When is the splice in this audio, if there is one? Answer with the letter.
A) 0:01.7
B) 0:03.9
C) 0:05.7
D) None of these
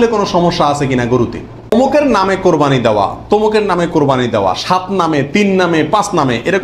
A